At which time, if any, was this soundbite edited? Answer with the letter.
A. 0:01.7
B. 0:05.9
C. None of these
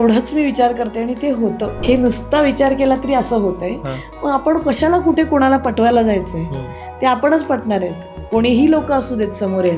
A